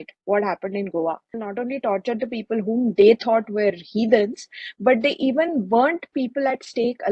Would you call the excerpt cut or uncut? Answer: cut